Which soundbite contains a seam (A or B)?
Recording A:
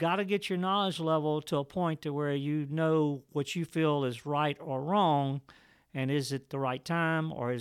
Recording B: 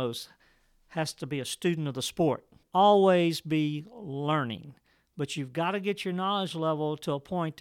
B